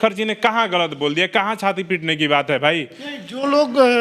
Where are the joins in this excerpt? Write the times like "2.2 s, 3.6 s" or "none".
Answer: none